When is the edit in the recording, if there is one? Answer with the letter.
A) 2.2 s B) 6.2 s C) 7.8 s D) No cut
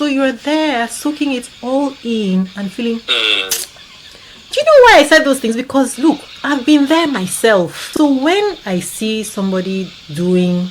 C